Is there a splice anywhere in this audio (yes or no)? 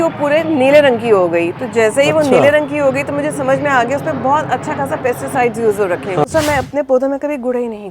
yes